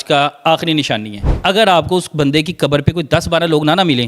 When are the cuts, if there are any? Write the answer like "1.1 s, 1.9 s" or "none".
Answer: 1.3 s